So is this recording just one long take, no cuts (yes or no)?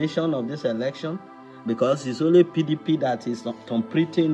yes